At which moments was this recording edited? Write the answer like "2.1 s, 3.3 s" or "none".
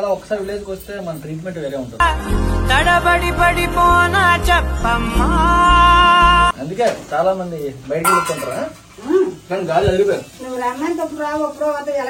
none